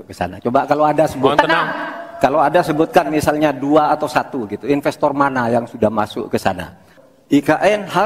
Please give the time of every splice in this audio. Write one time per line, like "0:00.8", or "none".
0:07.0